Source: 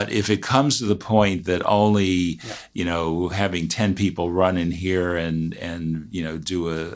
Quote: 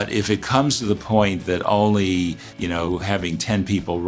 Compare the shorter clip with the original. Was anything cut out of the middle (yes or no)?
yes